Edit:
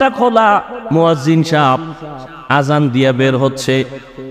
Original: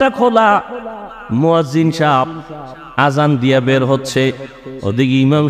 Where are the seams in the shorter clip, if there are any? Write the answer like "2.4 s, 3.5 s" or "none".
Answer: 0.9 s